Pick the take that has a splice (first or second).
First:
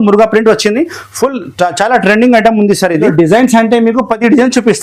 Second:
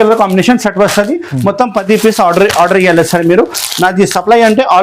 first